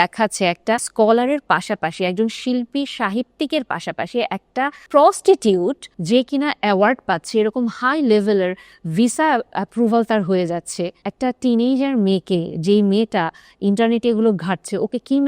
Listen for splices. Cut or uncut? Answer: cut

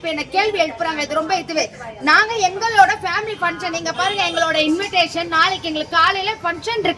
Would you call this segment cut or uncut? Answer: uncut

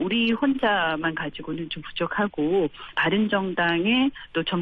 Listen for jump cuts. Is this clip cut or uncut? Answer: uncut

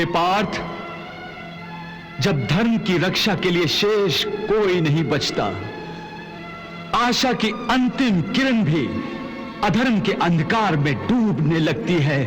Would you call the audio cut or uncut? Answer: uncut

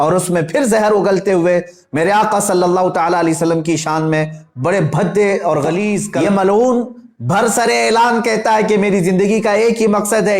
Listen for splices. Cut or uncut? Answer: cut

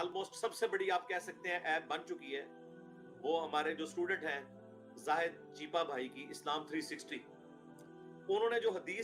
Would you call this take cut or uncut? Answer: uncut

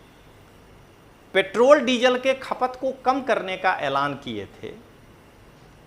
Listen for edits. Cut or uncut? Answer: uncut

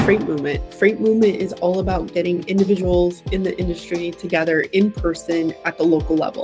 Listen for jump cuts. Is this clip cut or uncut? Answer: uncut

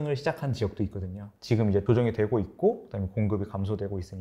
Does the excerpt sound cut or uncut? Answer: cut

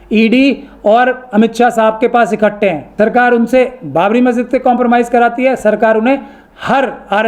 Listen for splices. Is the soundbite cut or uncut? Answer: cut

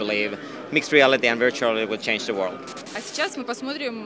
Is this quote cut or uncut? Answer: uncut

